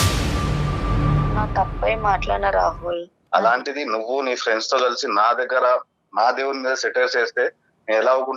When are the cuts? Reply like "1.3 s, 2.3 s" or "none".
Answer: none

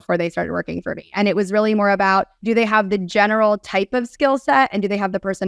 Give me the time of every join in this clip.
2.3 s

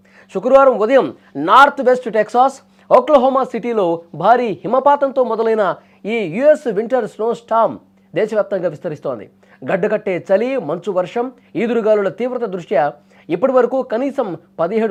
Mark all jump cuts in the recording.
none

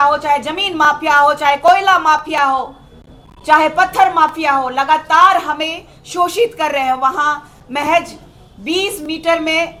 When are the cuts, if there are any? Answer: none

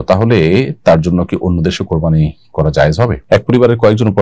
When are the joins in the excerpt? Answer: 3.2 s

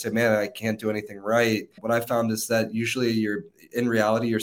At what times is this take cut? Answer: 1.7 s

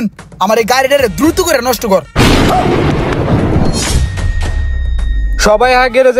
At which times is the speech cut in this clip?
none

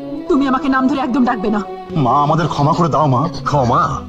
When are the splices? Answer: 1.8 s

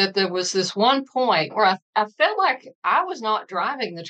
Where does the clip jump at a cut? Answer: 1.5 s

